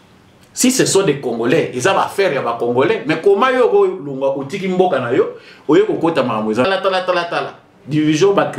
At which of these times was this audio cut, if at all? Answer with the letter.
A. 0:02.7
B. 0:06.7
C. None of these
B